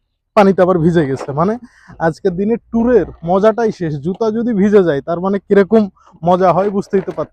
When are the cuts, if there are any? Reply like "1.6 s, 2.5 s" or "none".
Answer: none